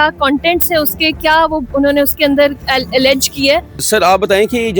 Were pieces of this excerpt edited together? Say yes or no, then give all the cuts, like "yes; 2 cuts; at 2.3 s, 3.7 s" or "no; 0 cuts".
yes; 1 cut; at 3.8 s